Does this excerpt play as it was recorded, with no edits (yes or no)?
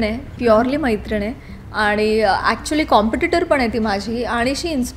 yes